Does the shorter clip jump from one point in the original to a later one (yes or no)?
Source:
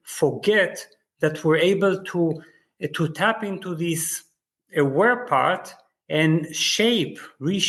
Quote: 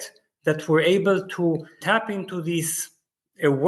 yes